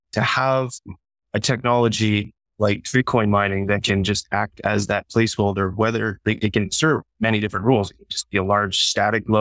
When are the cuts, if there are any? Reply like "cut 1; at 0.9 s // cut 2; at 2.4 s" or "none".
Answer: none